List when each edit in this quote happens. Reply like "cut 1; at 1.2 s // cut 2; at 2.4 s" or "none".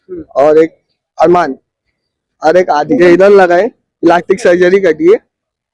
cut 1; at 3.0 s